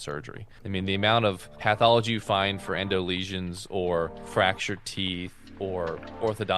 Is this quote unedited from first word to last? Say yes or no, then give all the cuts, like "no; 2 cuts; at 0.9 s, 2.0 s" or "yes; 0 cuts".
no; 2 cuts; at 4.2 s, 5.6 s